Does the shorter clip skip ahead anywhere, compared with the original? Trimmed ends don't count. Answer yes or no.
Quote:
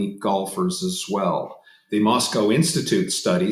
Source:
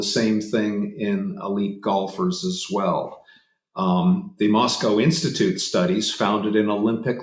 yes